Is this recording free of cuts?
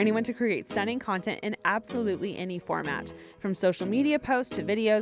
yes; 0 cuts

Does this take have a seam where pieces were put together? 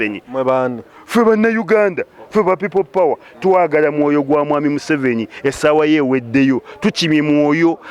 no; 0 cuts

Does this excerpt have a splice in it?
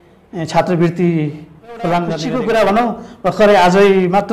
yes; 1 cut; at 2.2 s

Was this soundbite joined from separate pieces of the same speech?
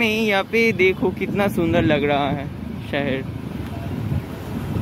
no; 0 cuts

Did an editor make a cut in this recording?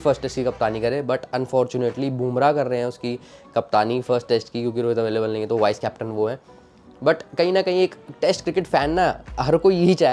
no; 0 cuts

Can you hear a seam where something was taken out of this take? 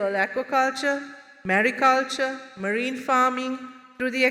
no; 0 cuts

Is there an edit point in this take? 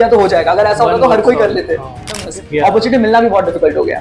yes; 1 cut; at 2.2 s

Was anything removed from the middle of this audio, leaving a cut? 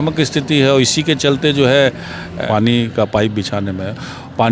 yes; 1 cut; at 2.4 s

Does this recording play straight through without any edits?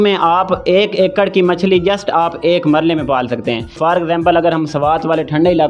no; 1 cut; at 3.8 s

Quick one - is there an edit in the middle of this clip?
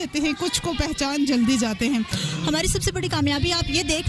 yes; 1 cut; at 2.2 s

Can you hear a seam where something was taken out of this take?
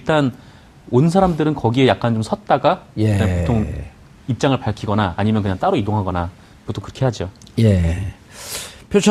no; 0 cuts

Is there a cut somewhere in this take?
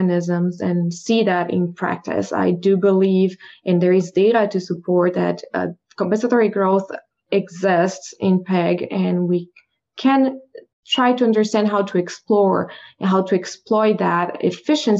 no; 0 cuts

